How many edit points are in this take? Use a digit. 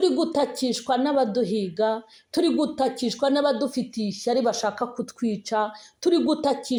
0